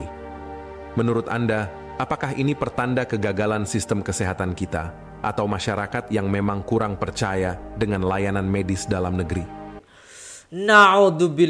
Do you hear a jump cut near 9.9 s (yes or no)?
yes